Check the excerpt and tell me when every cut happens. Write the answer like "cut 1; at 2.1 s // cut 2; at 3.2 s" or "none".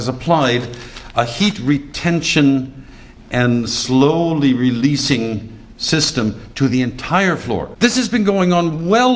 cut 1; at 7.7 s